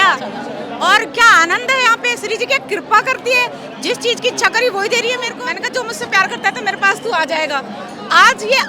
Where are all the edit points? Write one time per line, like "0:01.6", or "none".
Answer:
0:05.4